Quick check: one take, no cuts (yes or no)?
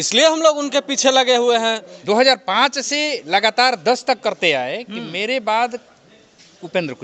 no